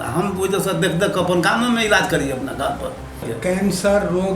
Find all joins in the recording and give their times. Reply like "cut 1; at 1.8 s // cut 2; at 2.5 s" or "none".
cut 1; at 3.3 s